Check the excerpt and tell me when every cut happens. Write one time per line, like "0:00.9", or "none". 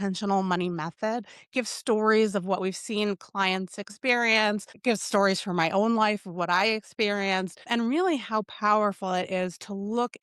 0:04.7
0:07.7